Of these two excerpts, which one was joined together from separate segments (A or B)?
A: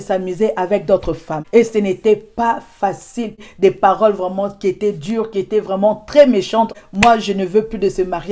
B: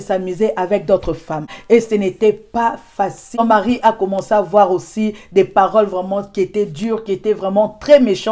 A